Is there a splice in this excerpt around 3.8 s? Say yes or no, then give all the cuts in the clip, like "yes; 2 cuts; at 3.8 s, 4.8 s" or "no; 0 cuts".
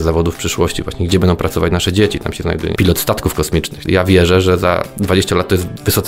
yes; 1 cut; at 3.8 s